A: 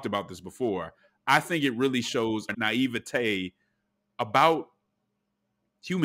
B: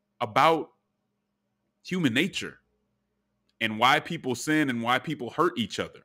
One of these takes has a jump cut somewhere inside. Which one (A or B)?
A